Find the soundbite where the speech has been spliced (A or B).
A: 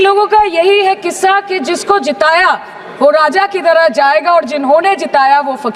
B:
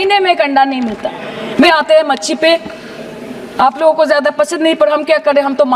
B